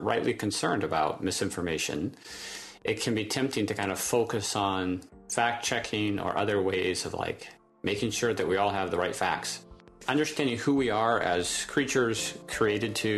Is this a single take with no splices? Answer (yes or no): no